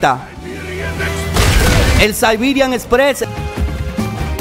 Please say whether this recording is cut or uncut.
cut